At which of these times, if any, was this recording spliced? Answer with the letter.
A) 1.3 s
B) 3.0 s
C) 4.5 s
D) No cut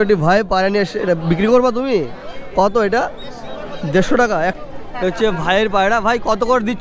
C